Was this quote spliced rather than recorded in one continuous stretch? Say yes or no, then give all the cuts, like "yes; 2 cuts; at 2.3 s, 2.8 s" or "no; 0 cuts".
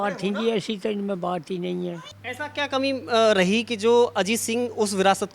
yes; 1 cut; at 2.1 s